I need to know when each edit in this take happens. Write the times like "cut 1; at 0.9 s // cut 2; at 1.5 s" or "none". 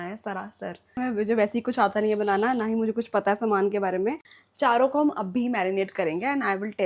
cut 1; at 1.0 s // cut 2; at 4.3 s